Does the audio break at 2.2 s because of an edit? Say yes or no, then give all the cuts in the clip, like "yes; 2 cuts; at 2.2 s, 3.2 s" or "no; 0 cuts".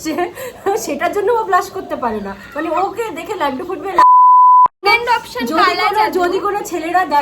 no; 2 cuts; at 3.9 s, 4.8 s